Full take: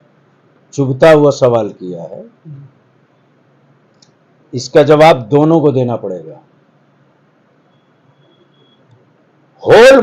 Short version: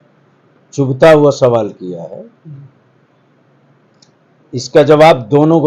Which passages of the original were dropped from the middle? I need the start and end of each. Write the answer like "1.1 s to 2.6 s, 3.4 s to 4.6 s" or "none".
none